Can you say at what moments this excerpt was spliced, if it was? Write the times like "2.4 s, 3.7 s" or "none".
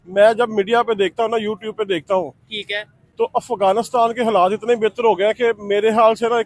none